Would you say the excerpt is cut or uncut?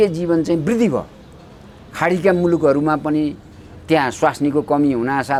uncut